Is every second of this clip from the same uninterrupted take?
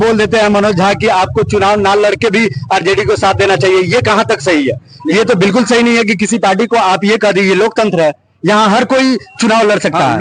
yes; 0 cuts

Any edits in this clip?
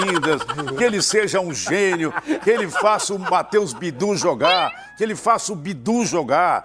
no; 0 cuts

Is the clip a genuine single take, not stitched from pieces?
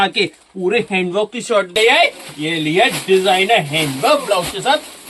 no; 1 cut; at 1.8 s

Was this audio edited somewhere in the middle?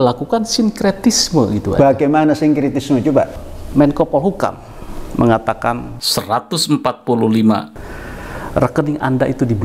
yes; 3 cuts; at 3.4 s, 5.9 s, 7.7 s

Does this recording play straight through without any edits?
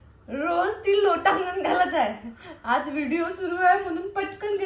yes; 0 cuts

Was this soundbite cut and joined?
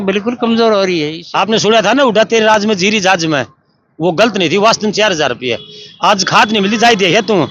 yes; 1 cut; at 1.2 s

